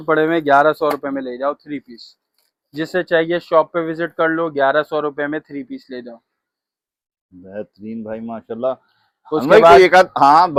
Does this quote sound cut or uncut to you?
uncut